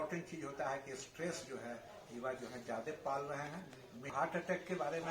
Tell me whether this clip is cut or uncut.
cut